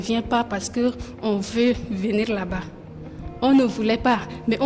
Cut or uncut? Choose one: uncut